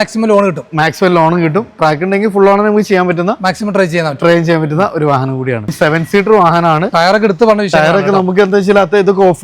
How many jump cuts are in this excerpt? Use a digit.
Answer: 1